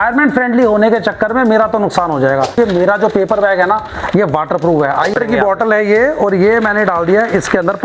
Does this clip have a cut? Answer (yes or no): yes